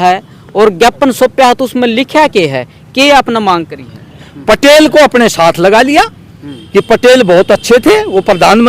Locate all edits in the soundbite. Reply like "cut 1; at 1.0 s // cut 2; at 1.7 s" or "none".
cut 1; at 4.2 s